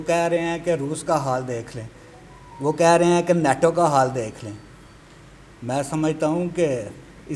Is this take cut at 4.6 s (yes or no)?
no